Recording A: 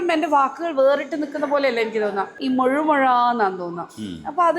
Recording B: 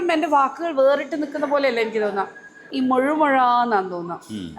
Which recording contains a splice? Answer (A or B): A